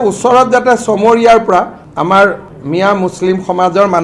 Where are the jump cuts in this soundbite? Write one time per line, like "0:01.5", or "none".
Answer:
0:01.8
0:02.5